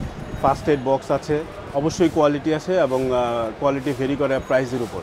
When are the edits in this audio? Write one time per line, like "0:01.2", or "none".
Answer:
none